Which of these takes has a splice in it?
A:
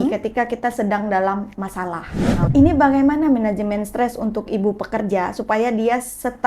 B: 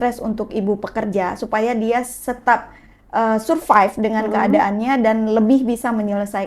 A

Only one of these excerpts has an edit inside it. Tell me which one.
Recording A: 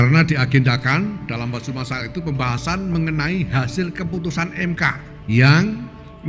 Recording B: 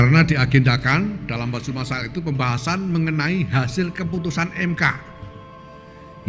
A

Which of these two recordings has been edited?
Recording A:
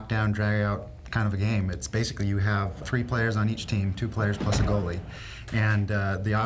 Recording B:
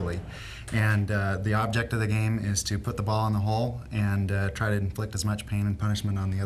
A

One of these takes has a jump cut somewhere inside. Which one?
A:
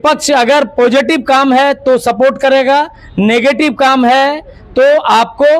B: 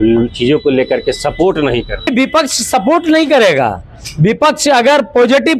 B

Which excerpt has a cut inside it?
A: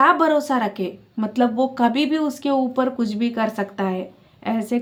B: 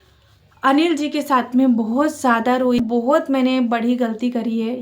B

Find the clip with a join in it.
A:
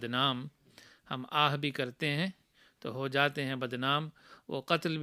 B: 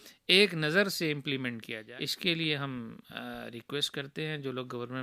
B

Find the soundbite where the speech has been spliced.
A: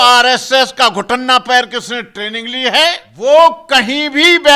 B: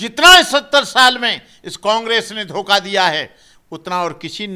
A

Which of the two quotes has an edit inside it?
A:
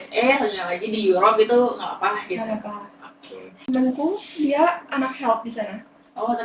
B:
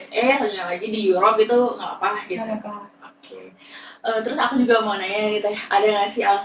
A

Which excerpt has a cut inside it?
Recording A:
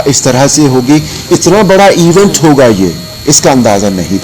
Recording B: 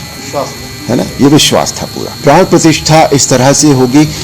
A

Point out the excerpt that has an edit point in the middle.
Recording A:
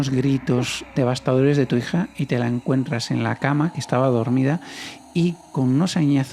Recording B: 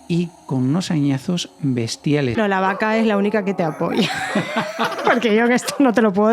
B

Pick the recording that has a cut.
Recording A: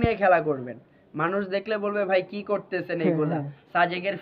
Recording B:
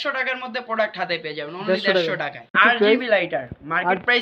B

